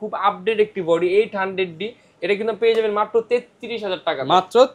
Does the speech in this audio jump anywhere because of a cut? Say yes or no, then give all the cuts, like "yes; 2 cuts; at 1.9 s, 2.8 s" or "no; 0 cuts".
no; 0 cuts